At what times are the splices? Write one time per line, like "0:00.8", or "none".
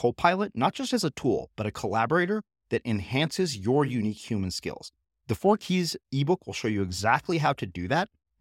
none